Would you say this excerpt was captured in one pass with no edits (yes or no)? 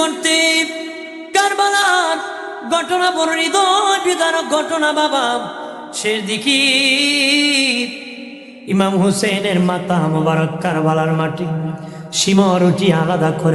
yes